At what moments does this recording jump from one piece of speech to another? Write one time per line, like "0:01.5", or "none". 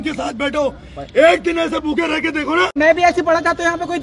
0:02.7